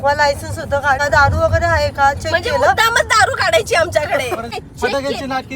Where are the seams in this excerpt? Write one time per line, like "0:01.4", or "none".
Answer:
0:01.0
0:04.5